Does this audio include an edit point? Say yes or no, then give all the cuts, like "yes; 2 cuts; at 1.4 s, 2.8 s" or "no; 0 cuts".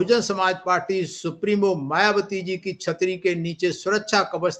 no; 0 cuts